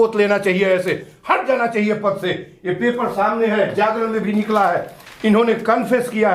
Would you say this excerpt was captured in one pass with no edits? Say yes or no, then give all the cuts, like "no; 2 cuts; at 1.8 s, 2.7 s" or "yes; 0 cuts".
yes; 0 cuts